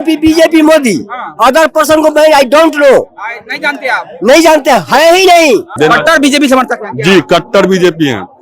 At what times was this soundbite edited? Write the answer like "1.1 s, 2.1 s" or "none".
5.7 s